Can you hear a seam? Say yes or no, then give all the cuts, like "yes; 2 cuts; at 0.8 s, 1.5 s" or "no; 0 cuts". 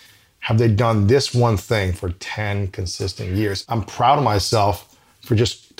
yes; 1 cut; at 3.6 s